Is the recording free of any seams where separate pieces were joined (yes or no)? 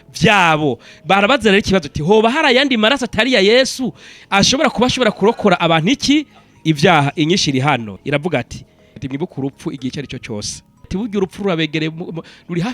no